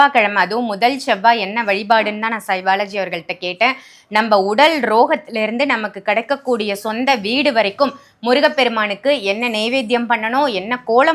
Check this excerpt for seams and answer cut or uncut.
uncut